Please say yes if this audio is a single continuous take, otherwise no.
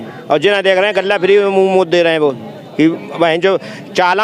yes